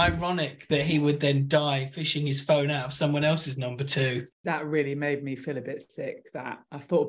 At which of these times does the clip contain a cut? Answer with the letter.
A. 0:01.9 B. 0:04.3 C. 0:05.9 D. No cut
B